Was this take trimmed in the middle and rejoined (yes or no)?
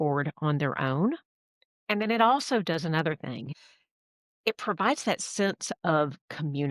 yes